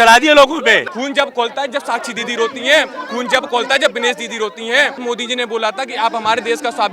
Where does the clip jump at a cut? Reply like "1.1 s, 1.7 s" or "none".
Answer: 0.9 s, 5.0 s